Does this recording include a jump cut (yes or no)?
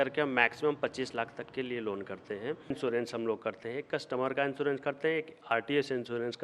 yes